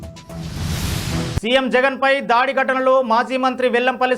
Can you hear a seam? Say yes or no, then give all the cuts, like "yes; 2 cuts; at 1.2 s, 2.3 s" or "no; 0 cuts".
yes; 1 cut; at 1.3 s